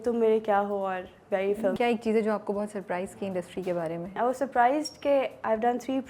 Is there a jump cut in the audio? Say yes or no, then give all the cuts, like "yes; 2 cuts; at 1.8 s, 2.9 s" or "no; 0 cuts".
yes; 2 cuts; at 1.8 s, 4.2 s